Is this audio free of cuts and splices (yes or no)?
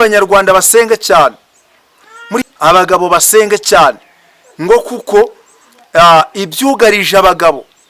no